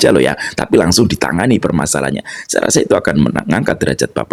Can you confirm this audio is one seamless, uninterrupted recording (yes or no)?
yes